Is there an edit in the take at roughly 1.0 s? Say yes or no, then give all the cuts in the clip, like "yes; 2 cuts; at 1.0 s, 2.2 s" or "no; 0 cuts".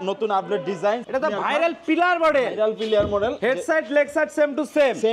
yes; 1 cut; at 1.0 s